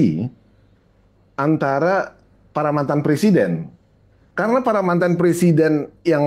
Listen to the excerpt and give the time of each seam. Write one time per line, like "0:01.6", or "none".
none